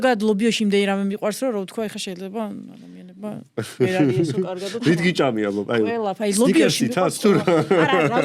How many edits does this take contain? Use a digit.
0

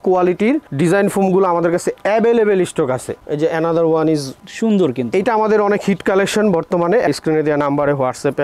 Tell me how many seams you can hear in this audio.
2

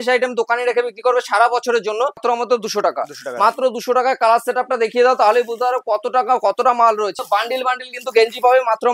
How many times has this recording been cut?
2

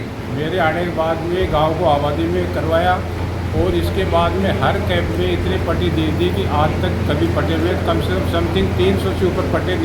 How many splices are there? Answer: 0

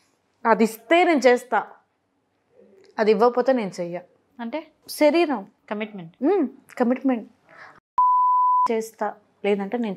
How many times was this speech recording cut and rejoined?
0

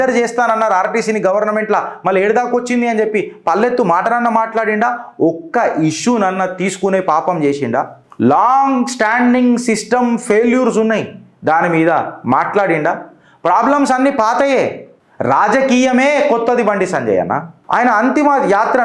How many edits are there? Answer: 2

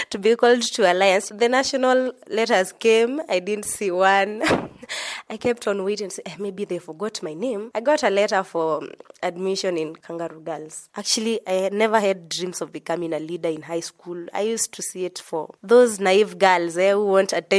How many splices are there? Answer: 3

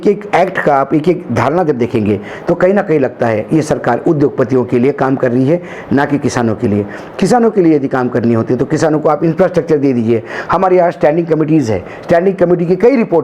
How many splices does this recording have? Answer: 0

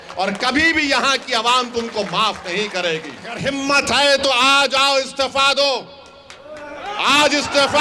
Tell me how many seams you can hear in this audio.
1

